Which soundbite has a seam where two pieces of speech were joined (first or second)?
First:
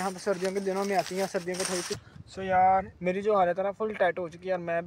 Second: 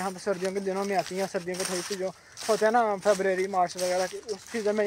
first